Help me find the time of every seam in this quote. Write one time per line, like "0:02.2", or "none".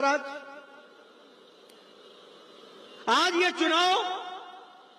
none